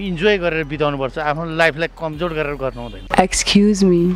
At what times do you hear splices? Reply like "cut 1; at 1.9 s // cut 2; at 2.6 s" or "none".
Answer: cut 1; at 3.1 s

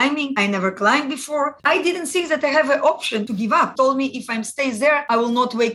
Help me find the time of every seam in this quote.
cut 1; at 1.6 s // cut 2; at 3.7 s

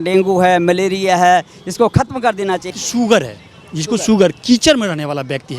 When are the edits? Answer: cut 1; at 2.7 s

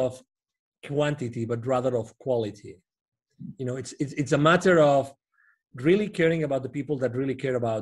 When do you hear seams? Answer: none

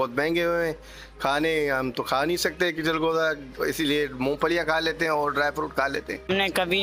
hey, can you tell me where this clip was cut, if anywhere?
none

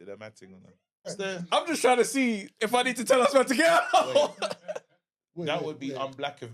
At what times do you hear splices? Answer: cut 1; at 1.2 s

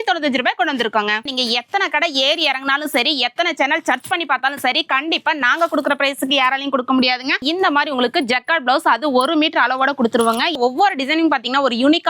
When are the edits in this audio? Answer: cut 1; at 1.2 s // cut 2; at 7.4 s // cut 3; at 10.6 s

